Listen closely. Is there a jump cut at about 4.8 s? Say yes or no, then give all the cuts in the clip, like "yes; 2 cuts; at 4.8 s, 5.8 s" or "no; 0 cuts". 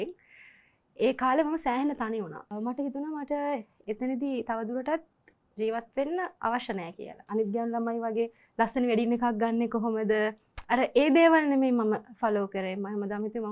no; 2 cuts; at 2.5 s, 7.2 s